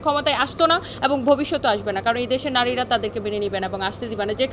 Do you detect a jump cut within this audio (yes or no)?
no